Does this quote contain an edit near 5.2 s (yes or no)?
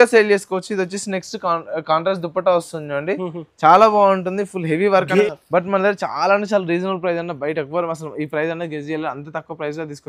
yes